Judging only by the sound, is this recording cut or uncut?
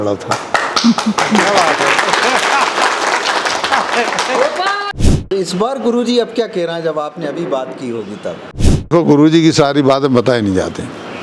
cut